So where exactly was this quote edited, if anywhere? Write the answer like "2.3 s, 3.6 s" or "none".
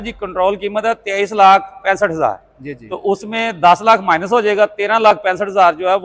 none